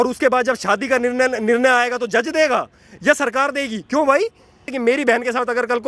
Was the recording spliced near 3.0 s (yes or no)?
no